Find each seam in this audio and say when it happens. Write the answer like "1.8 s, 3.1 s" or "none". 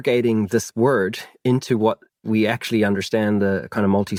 none